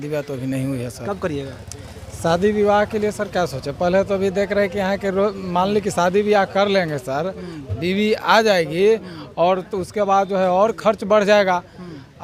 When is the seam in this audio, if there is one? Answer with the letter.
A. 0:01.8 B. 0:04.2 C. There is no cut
C